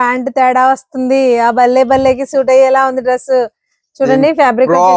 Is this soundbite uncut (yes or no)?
yes